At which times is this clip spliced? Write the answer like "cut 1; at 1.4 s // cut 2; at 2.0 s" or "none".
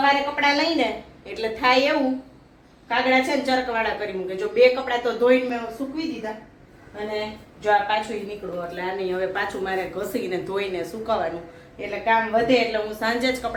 none